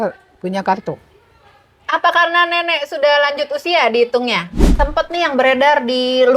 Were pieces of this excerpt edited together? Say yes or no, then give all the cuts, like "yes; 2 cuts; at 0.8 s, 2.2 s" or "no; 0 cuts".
yes; 1 cut; at 4.7 s